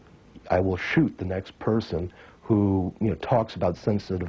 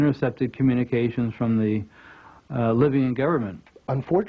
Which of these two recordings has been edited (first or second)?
first